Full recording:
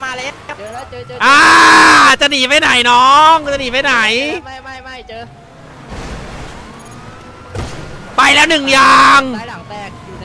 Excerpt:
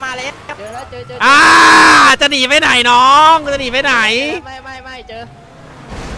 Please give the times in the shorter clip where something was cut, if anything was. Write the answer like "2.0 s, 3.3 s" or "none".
none